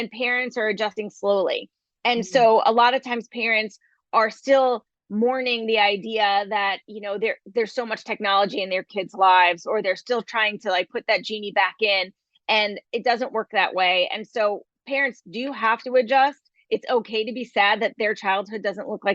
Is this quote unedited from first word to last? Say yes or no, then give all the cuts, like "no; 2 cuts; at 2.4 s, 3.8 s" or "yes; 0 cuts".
no; 1 cut; at 0.9 s